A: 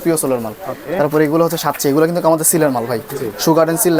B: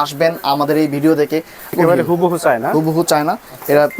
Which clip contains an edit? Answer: B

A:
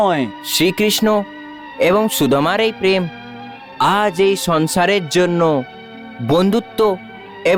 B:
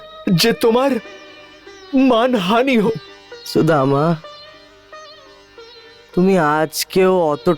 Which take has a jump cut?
B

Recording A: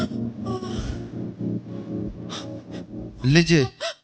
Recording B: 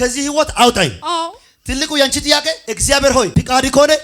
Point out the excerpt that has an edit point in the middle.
B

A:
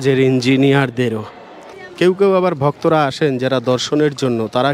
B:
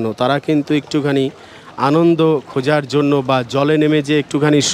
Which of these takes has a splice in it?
A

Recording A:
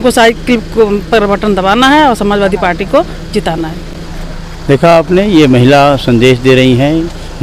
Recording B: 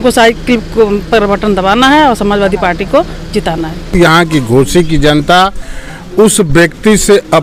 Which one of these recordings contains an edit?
B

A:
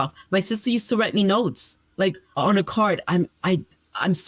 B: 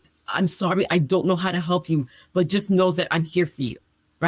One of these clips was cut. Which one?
A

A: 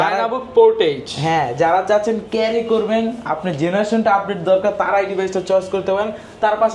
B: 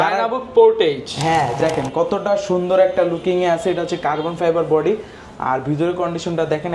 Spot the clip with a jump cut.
B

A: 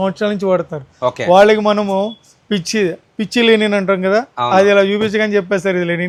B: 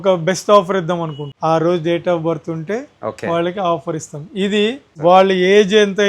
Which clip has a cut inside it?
B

